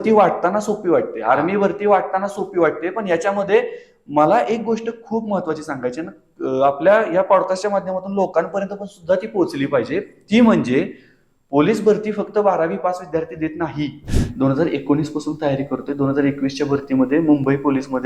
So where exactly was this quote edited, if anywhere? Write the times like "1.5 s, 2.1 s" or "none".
14.0 s

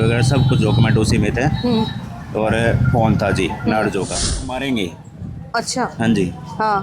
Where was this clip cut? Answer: 4.4 s

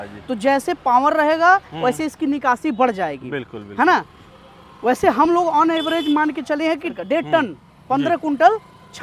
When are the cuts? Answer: 6.9 s

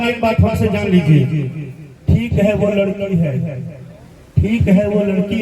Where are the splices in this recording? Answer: none

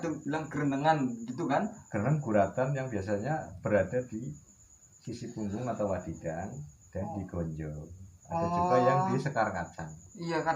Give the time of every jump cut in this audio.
none

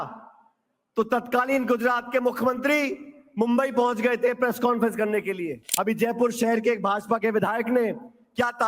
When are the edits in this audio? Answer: 5.6 s

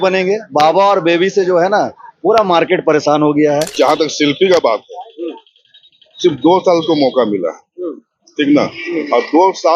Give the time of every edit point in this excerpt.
3.7 s

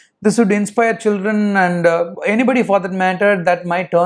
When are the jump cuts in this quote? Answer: none

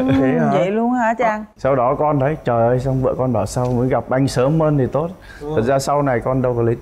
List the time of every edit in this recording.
1.5 s

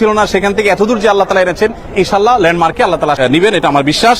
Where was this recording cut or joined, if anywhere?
3.2 s

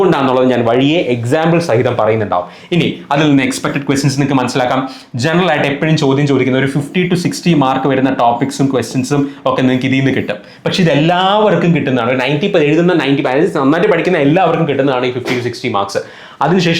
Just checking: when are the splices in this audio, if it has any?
none

